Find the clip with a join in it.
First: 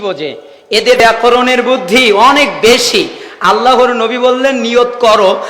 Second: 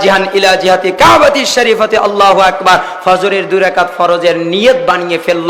first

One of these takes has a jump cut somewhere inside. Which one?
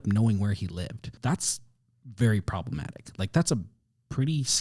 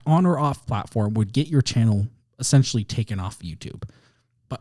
first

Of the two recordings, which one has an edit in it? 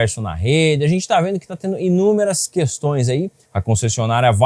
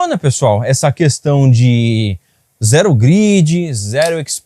first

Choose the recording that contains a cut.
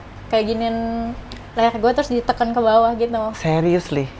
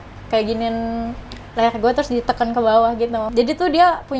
second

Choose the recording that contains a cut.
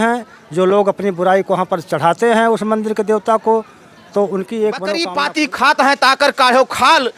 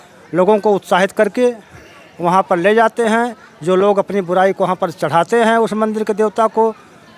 first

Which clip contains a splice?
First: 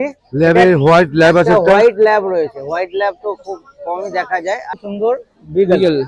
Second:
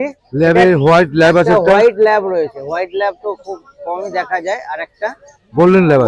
first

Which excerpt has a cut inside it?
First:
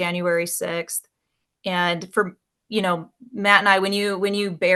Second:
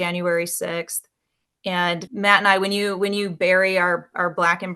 second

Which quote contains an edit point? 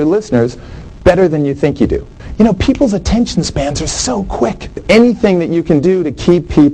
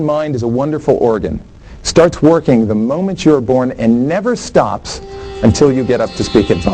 first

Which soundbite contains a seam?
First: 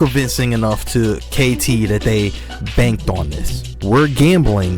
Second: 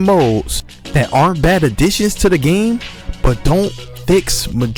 first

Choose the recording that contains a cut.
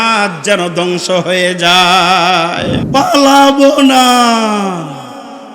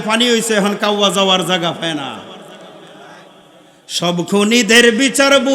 first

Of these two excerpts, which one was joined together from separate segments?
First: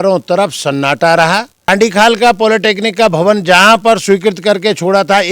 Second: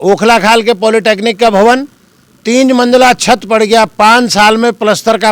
first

